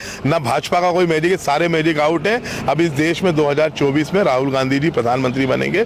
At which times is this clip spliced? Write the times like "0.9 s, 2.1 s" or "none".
none